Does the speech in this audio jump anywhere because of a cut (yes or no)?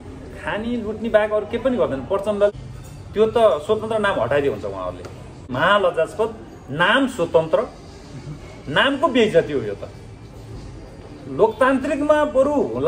yes